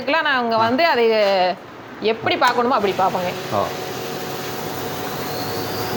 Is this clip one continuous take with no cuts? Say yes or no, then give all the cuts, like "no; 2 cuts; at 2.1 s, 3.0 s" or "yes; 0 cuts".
yes; 0 cuts